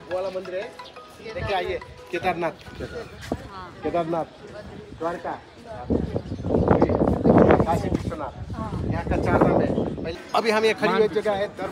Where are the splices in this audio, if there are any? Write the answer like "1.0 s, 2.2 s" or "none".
10.1 s

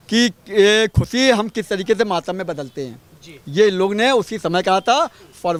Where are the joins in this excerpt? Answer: none

